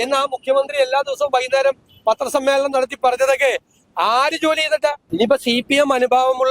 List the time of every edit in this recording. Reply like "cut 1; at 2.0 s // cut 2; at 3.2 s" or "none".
cut 1; at 5.0 s